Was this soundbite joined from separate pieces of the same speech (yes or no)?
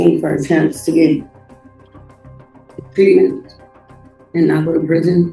no